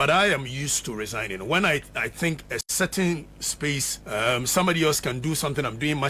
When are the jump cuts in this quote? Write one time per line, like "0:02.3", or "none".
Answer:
0:03.9